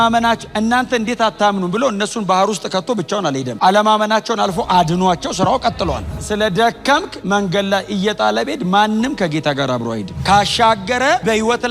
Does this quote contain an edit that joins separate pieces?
yes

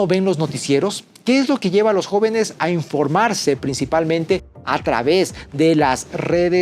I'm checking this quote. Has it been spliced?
no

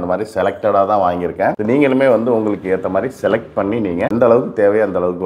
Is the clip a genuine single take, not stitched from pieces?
yes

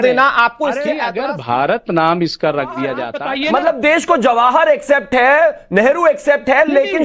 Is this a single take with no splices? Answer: no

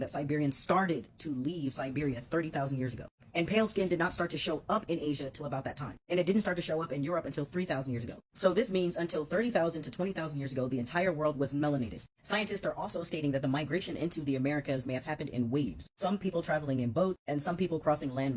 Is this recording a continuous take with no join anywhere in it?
yes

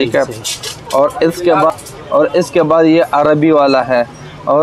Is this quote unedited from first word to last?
no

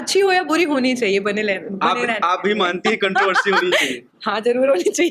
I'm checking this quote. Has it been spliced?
no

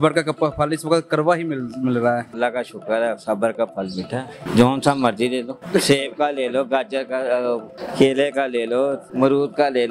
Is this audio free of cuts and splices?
no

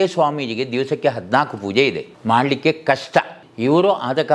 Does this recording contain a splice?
yes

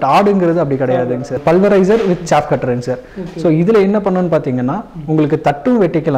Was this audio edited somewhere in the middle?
yes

